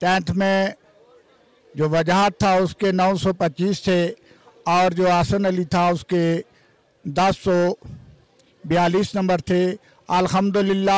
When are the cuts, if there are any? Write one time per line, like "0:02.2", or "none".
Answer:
none

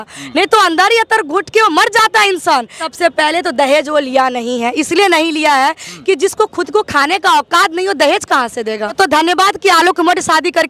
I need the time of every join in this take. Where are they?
0:02.8
0:08.9

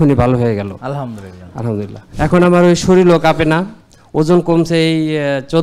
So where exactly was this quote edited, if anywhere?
0:02.0

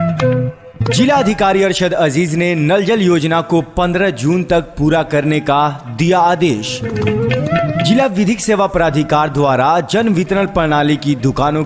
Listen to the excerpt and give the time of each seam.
0:00.9

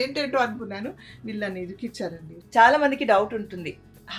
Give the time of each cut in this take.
0:02.3

